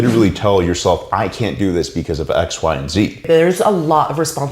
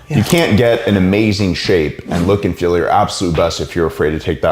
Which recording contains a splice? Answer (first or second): first